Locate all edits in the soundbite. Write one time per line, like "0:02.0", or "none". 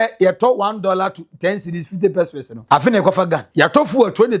0:02.5
0:03.5